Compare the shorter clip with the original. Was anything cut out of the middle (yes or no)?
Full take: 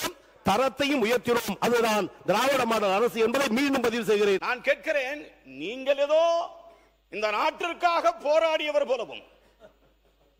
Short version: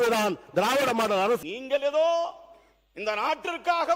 yes